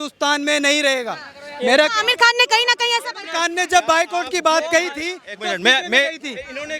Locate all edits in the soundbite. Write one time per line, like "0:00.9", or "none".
none